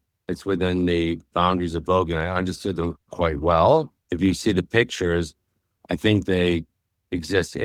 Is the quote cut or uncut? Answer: uncut